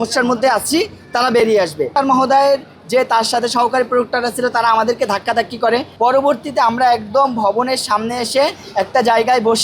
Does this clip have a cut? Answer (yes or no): yes